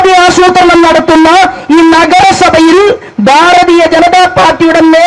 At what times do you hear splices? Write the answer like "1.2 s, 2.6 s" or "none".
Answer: none